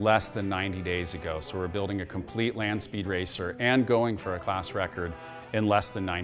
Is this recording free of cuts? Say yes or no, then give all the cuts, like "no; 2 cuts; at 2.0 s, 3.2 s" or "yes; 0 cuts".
yes; 0 cuts